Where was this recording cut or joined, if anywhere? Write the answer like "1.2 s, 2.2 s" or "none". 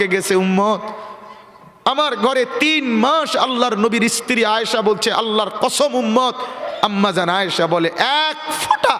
6.7 s